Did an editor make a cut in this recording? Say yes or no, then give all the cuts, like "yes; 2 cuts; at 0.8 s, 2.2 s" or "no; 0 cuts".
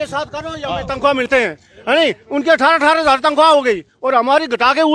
yes; 1 cut; at 1.3 s